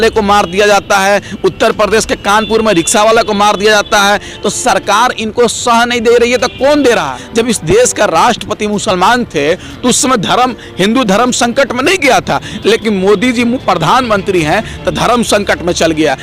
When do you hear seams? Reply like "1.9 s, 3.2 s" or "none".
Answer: 7.2 s